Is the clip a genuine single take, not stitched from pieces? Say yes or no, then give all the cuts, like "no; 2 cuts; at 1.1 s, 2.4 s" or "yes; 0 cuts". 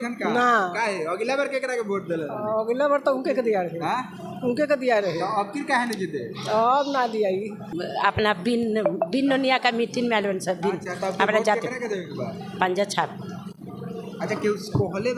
no; 1 cut; at 7.7 s